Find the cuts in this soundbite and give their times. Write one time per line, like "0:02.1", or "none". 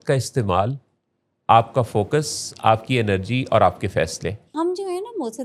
0:04.5

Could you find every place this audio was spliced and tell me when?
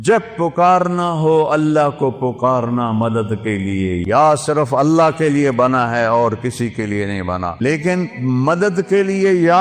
0:04.0
0:07.6

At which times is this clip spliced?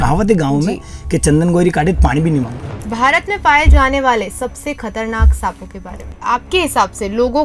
0:02.8
0:06.1

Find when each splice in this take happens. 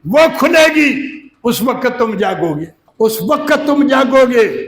0:02.8

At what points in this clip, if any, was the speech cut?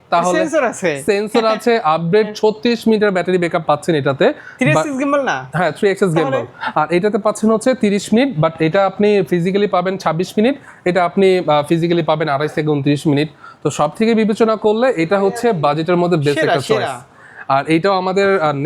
none

